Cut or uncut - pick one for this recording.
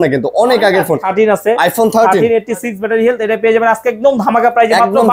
cut